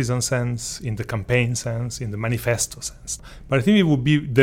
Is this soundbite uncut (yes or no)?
no